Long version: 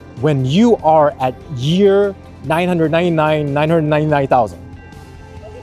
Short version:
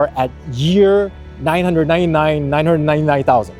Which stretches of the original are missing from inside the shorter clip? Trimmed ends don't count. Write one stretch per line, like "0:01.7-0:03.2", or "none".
none